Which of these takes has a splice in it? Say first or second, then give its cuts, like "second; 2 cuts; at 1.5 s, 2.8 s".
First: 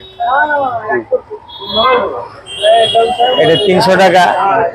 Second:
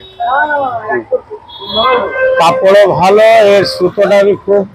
second; 1 cut; at 2.1 s